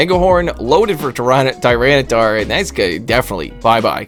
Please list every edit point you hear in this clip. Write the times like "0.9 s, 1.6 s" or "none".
none